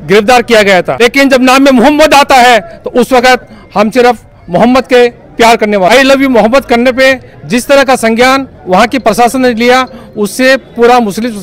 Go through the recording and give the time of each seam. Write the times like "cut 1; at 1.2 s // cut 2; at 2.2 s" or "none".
cut 1; at 0.9 s // cut 2; at 5.9 s